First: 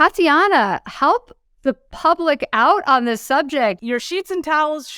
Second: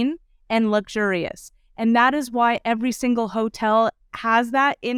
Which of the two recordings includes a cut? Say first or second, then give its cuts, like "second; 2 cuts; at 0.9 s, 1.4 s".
first; 1 cut; at 3.8 s